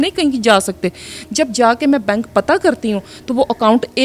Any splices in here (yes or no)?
no